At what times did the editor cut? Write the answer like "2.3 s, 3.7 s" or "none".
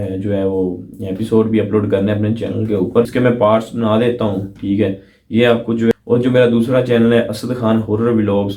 3.1 s, 5.9 s